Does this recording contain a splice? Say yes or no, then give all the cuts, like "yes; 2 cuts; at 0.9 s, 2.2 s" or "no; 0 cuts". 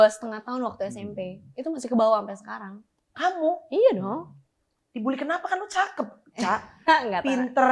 no; 0 cuts